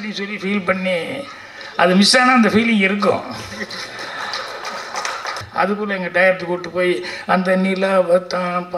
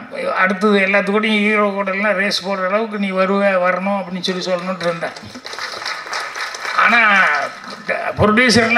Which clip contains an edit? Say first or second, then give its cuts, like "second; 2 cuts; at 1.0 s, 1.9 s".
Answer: first; 1 cut; at 5.4 s